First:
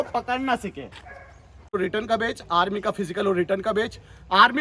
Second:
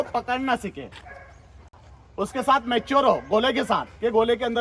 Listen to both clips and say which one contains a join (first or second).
first